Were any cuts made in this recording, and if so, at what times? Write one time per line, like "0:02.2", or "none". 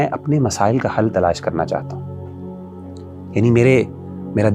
none